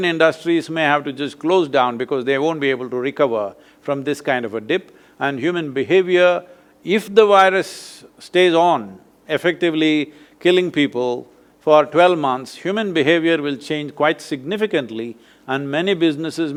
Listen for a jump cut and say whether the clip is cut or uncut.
uncut